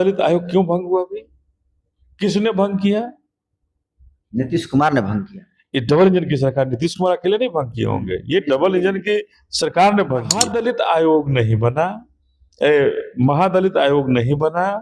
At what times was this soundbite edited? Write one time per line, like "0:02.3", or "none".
0:10.5